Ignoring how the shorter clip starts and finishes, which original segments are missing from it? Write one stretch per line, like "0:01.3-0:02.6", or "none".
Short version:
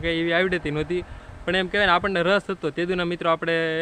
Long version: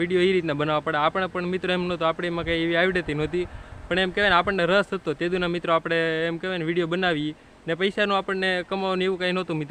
none